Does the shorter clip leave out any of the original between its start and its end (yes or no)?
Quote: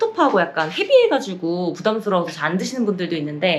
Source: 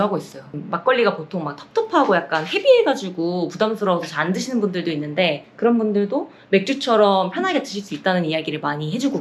no